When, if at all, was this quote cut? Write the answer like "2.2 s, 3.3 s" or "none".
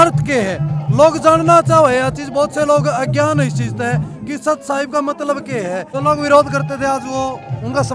5.9 s